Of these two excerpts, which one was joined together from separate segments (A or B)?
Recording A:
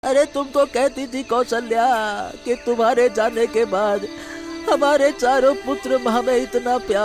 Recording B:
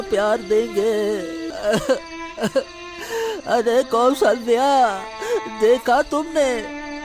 B